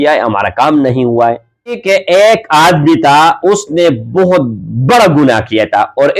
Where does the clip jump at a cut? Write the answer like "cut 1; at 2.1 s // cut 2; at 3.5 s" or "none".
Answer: cut 1; at 1.8 s